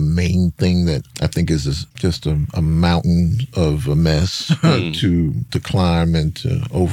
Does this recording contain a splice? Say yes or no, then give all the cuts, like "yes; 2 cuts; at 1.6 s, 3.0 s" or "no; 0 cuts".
yes; 3 cuts; at 1.1 s, 1.8 s, 5.4 s